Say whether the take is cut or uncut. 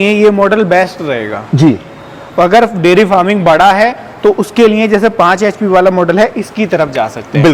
uncut